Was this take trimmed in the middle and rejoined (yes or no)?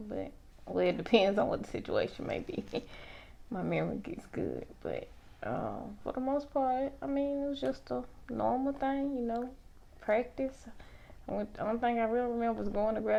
no